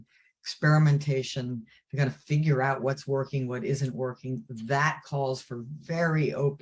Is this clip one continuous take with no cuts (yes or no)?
yes